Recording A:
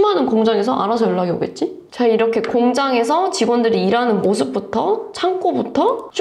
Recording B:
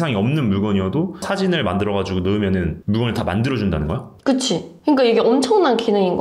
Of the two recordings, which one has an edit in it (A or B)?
A